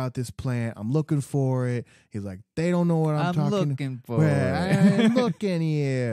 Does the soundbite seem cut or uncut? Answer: uncut